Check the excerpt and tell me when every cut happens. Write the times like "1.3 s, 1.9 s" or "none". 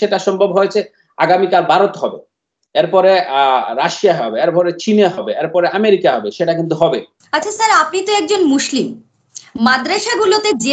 7.2 s

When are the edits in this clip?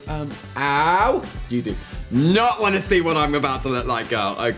1.4 s

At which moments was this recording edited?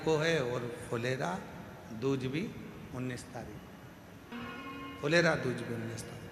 4.3 s

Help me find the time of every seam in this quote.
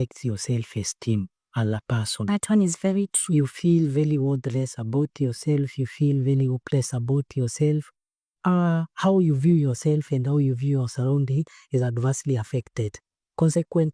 none

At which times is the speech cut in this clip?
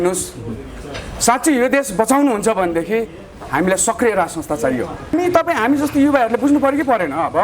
5.1 s

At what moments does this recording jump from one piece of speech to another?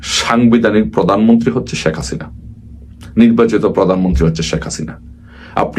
none

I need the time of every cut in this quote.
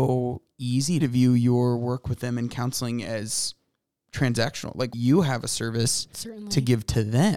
1.0 s, 4.9 s

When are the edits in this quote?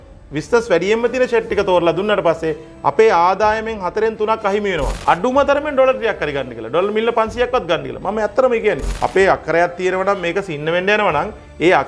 4.9 s, 8.9 s

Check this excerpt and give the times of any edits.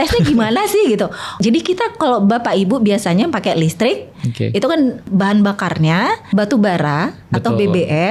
1.4 s, 5.1 s, 6.2 s

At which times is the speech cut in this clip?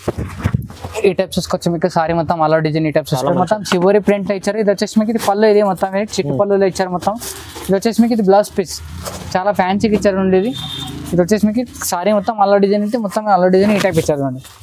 3.1 s

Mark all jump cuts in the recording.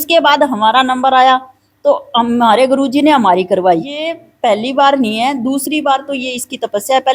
4.2 s

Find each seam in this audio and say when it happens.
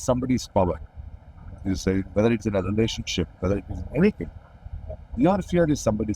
none

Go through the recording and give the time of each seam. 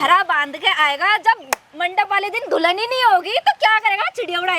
none

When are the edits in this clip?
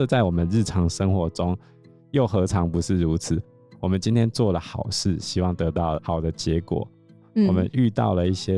none

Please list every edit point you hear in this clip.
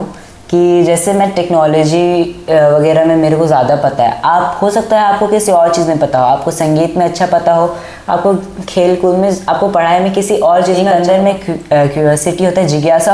10.9 s

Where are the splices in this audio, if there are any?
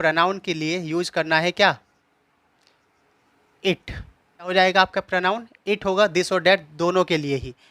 4.5 s

